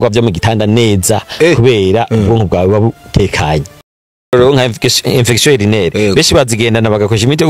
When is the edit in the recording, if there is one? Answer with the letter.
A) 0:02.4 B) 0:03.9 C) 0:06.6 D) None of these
B